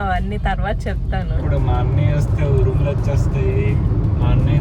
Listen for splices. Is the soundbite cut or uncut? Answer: cut